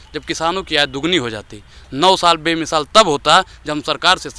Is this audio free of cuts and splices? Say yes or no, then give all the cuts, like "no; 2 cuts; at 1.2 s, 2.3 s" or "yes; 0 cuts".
yes; 0 cuts